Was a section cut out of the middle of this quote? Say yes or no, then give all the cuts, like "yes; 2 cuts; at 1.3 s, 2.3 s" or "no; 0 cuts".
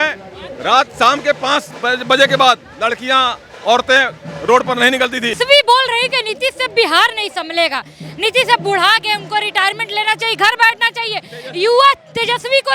yes; 1 cut; at 5.3 s